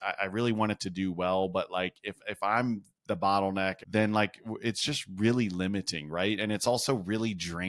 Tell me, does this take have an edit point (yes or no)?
yes